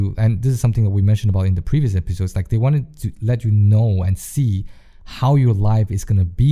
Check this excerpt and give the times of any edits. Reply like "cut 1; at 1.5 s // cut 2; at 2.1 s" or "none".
none